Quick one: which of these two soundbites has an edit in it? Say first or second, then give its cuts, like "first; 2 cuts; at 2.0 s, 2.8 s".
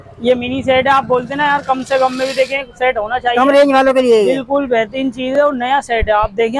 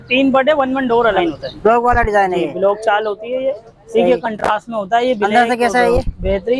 second; 1 cut; at 1.2 s